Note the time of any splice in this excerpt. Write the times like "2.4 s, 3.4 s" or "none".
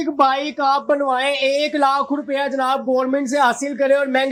none

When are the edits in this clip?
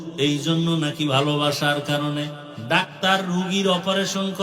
2.5 s

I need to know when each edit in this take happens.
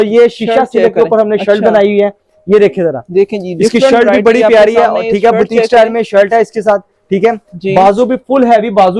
none

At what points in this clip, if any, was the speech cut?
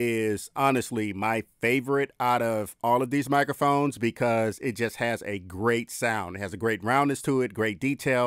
none

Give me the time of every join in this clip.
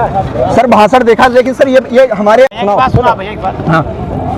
none

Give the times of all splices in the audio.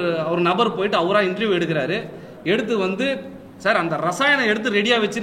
none

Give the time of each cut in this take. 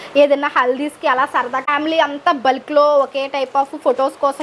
1.7 s

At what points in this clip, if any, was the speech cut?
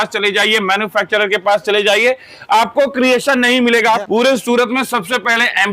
4.0 s

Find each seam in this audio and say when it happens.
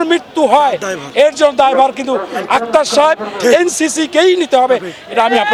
none

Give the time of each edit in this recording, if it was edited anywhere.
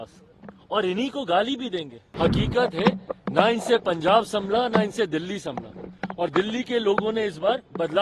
2.0 s

